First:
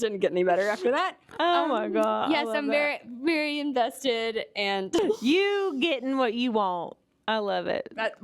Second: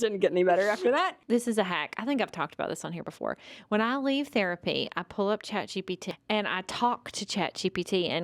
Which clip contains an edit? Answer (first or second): second